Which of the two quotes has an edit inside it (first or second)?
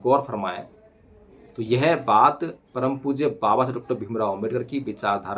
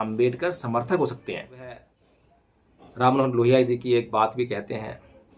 second